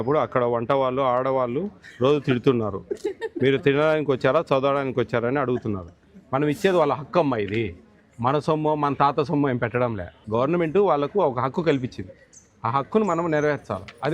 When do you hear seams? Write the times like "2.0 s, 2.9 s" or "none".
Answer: 10.2 s